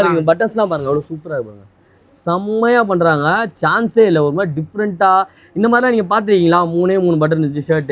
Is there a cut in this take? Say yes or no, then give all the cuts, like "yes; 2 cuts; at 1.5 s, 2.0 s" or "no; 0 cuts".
no; 0 cuts